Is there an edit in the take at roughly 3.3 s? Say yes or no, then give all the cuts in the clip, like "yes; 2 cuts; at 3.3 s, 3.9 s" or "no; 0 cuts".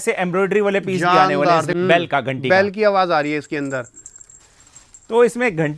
no; 1 cut; at 1.7 s